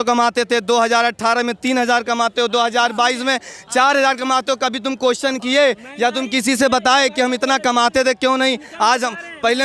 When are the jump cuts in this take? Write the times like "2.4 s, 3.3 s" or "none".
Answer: none